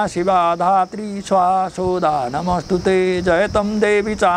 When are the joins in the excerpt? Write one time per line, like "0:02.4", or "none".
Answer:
none